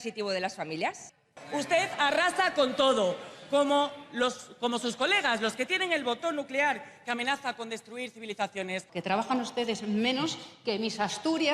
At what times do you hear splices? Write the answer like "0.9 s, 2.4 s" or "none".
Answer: 1.4 s, 8.9 s